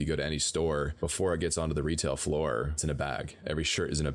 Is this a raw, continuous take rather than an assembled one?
no; 2 cuts; at 0.9 s, 2.8 s

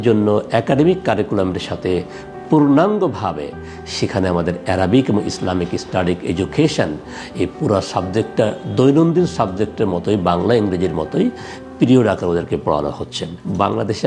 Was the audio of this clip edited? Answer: no; 0 cuts

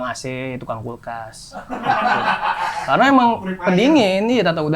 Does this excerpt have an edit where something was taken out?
no; 0 cuts

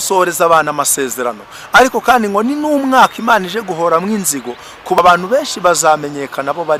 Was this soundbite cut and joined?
yes; 1 cut; at 5.0 s

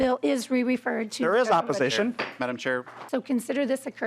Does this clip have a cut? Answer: yes; 1 cut; at 2.9 s

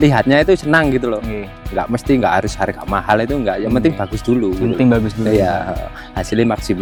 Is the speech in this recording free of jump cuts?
yes; 0 cuts

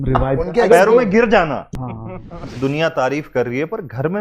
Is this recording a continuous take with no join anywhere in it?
no; 1 cut; at 2.3 s

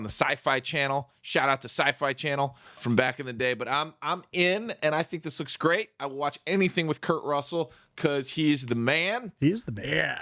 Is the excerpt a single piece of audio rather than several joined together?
no; 1 cut; at 2.8 s

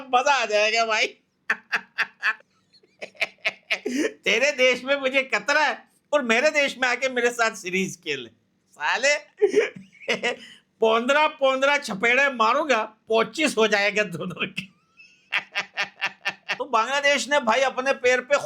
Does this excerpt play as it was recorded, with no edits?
no; 2 cuts; at 2.3 s, 16.5 s

